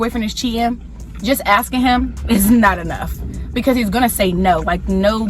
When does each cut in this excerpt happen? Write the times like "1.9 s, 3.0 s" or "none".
none

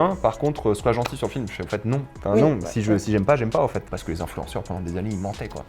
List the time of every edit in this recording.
3.8 s

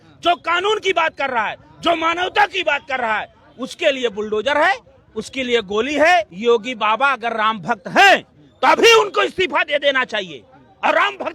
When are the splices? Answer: 6.3 s

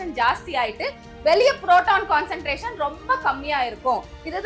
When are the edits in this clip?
none

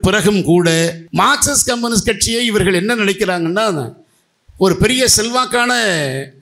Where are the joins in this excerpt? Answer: 1.0 s

